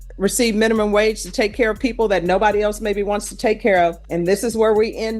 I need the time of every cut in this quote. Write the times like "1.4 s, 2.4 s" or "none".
4.0 s